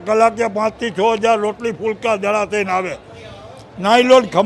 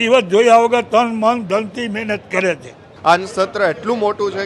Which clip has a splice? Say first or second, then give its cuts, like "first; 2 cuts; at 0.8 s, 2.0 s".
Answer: second; 1 cut; at 2.9 s